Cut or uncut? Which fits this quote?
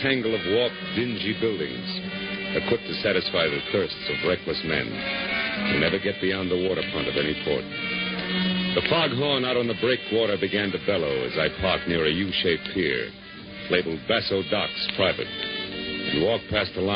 cut